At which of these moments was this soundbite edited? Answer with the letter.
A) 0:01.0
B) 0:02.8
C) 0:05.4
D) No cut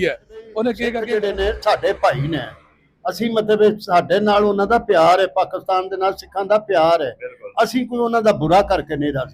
A